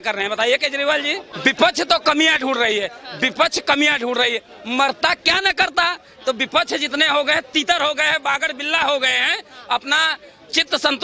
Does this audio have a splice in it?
yes; 1 cut; at 1.3 s

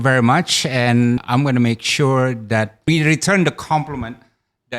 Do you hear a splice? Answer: yes; 2 cuts; at 1.2 s, 2.8 s

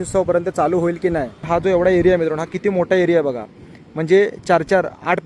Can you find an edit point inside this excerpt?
yes; 1 cut; at 1.4 s

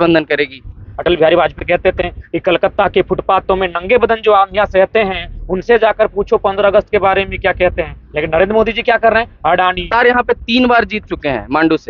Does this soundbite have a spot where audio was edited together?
yes; 2 cuts; at 0.9 s, 9.9 s

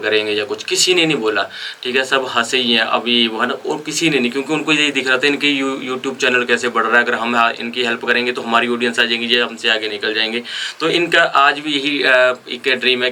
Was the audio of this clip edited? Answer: no; 0 cuts

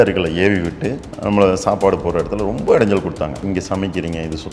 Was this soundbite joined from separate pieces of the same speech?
yes; 1 cut; at 3.4 s

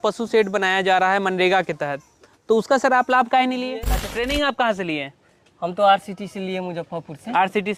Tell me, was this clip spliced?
yes; 1 cut; at 3.9 s

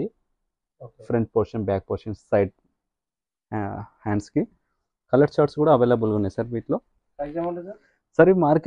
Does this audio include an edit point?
no; 0 cuts

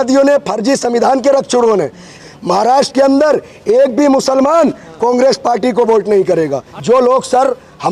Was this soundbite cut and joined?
yes; 2 cuts; at 2.2 s, 6.7 s

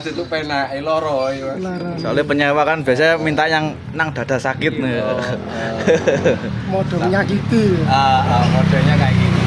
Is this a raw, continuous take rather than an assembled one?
yes; 0 cuts

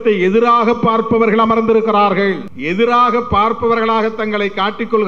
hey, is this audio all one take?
no; 1 cut; at 2.5 s

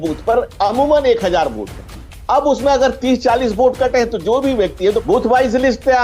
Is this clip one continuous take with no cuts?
no; 1 cut; at 5.0 s

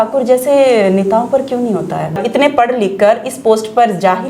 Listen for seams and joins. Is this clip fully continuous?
no; 1 cut; at 2.2 s

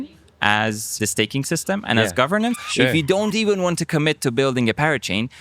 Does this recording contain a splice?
yes; 2 cuts; at 1.0 s, 2.6 s

